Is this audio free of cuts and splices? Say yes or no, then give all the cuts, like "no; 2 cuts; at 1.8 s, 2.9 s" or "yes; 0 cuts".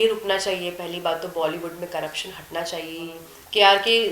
no; 1 cut; at 3.2 s